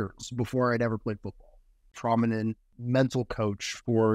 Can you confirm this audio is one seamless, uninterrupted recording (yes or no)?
no